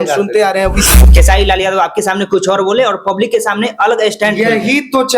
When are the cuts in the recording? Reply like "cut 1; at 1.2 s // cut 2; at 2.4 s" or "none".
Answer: cut 1; at 1.0 s